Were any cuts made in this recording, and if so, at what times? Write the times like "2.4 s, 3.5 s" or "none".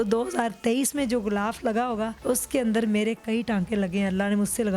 2.2 s